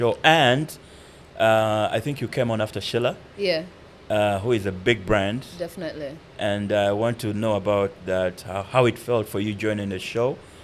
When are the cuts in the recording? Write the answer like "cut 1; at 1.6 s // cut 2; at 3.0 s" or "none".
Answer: none